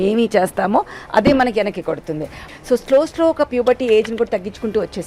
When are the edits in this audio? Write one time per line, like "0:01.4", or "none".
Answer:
0:02.3